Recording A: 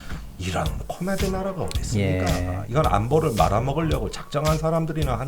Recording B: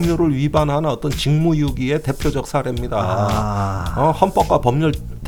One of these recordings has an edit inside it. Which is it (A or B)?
A